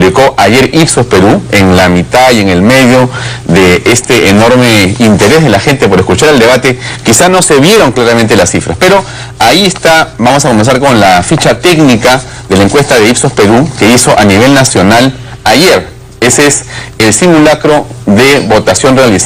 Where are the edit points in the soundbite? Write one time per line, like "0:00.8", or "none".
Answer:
0:15.5